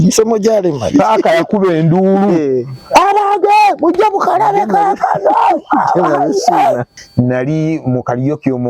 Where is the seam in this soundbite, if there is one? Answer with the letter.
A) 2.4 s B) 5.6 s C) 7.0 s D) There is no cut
C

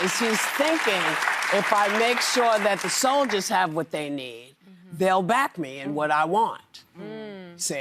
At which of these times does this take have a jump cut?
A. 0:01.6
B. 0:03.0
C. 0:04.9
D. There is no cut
D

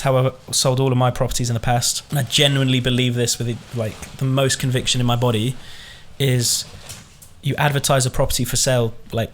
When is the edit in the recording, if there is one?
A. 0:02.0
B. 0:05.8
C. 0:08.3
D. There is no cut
A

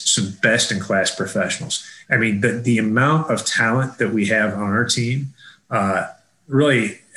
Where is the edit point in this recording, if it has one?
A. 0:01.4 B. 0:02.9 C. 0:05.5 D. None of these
D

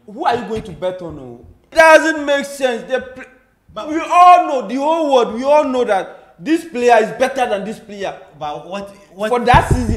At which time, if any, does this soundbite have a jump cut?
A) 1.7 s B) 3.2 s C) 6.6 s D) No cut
A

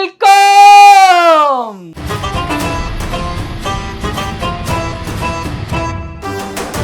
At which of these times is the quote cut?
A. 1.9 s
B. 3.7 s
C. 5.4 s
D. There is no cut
A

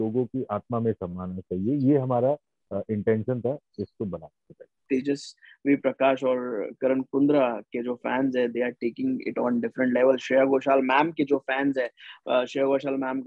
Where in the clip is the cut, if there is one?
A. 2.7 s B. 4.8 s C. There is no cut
B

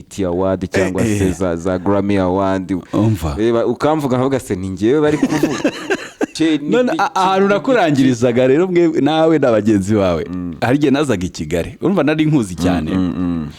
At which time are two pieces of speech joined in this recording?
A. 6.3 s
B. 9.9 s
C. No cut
A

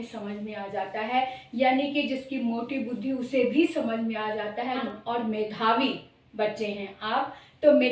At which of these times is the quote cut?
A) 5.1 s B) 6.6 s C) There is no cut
A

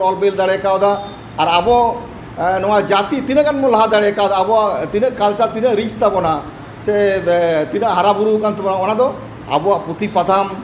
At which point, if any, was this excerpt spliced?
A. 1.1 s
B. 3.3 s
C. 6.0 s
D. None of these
D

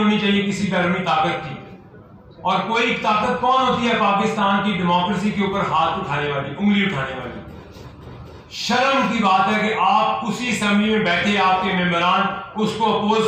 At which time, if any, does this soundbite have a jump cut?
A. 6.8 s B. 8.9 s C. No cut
C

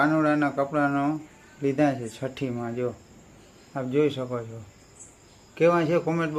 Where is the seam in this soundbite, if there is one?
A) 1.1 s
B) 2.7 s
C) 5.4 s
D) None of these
D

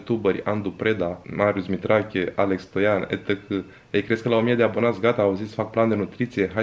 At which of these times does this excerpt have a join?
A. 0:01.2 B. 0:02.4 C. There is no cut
A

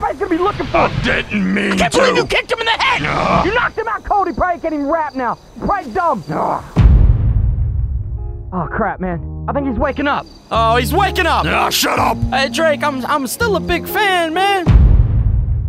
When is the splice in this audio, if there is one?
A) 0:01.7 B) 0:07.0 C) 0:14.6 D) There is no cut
C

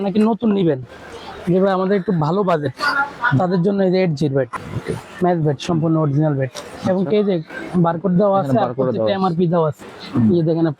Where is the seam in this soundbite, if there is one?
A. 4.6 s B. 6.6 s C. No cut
A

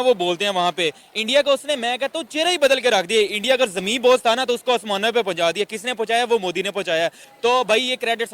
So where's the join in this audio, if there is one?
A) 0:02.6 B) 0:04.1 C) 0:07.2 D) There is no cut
C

